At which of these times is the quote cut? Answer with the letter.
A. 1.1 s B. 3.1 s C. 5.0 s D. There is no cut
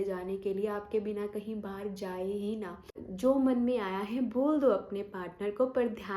B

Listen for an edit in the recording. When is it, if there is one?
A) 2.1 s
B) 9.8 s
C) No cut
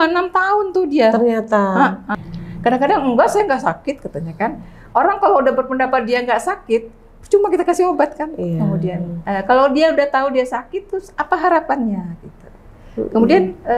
A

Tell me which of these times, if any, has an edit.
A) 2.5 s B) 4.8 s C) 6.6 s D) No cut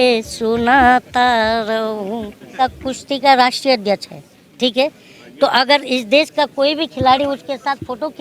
A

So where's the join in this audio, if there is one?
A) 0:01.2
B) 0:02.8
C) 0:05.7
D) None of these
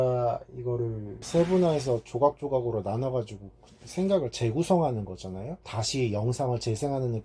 A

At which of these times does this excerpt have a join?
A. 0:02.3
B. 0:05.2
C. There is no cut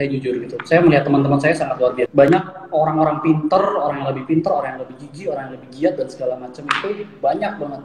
A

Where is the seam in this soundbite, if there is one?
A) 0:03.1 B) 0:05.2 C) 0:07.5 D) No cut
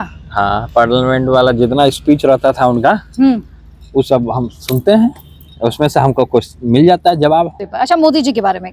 C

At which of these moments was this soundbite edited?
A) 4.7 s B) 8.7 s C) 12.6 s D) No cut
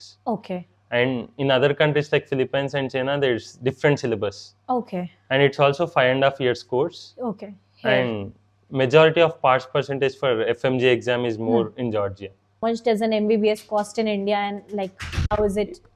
C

